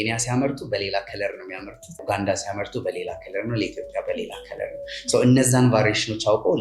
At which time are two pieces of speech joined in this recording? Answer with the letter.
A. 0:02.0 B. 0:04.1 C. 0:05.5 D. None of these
A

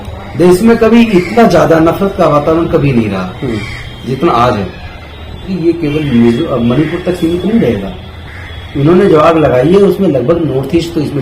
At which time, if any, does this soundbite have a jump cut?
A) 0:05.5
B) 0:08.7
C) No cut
A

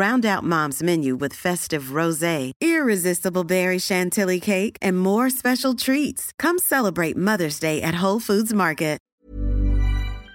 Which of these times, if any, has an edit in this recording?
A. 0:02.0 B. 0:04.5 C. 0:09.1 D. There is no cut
C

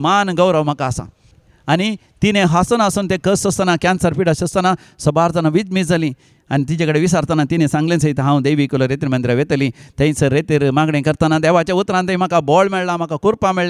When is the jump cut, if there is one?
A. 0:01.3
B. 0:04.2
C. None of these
A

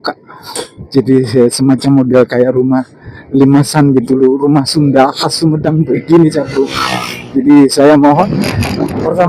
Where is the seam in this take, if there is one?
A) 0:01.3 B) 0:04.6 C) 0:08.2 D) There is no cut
C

